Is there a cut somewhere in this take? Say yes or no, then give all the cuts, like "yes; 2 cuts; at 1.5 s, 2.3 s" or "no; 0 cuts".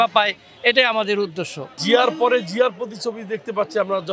yes; 1 cut; at 1.8 s